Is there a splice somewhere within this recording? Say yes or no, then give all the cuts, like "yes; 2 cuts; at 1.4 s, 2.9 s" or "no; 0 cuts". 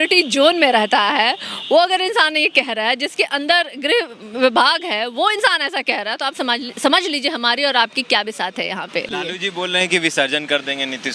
yes; 1 cut; at 9.1 s